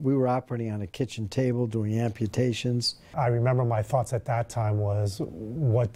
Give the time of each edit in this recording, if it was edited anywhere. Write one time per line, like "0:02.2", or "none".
0:03.1